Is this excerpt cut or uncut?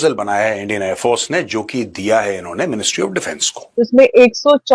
cut